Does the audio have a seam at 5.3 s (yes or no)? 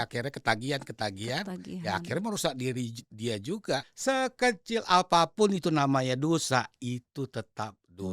no